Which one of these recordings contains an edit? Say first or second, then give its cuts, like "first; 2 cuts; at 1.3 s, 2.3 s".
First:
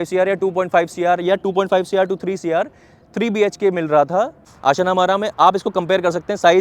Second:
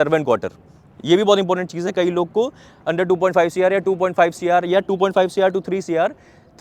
first; 1 cut; at 4.4 s